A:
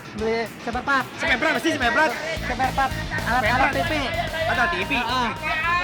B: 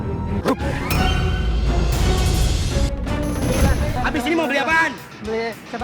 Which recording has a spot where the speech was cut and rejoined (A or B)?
B